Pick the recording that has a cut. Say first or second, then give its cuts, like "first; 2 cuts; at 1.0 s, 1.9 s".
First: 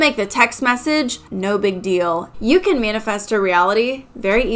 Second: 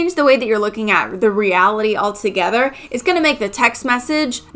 first; 1 cut; at 2.3 s